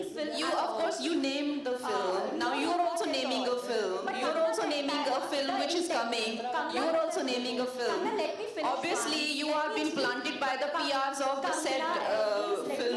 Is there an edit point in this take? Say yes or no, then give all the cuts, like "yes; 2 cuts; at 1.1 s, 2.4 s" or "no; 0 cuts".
no; 0 cuts